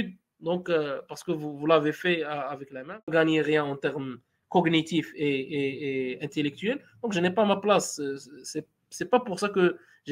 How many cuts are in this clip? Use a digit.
1